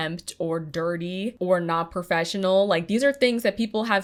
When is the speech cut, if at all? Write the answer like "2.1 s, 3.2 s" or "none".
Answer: none